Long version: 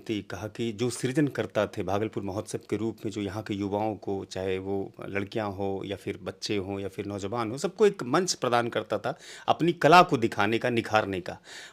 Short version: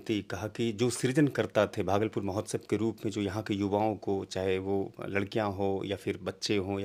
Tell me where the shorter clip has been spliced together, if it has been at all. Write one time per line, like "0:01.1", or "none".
none